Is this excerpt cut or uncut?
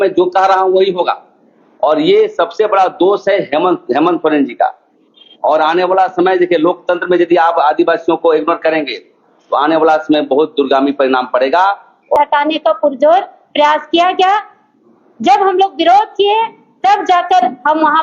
cut